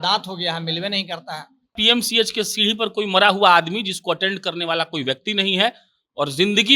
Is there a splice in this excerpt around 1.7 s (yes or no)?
yes